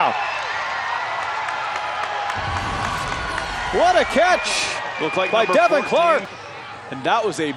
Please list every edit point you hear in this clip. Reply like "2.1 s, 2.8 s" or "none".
6.3 s

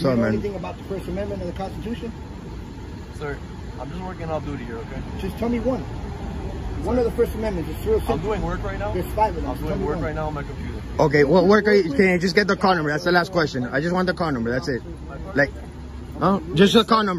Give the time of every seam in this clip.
none

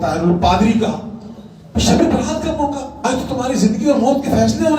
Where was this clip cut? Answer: 3.0 s

